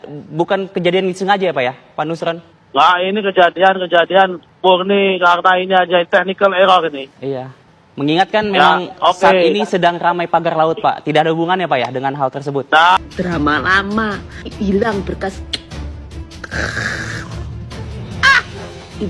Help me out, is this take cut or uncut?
cut